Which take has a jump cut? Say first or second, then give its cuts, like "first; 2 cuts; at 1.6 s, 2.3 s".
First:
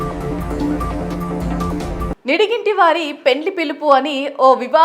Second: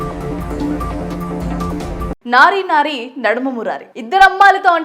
second; 1 cut; at 2.2 s